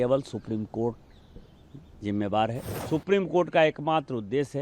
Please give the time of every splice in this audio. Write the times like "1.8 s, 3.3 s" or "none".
2.7 s